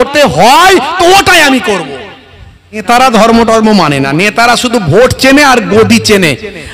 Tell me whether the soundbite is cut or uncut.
cut